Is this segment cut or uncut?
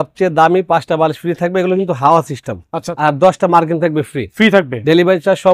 cut